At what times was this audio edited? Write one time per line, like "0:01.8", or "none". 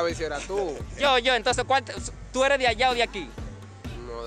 none